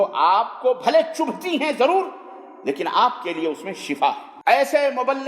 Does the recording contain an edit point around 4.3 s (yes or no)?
yes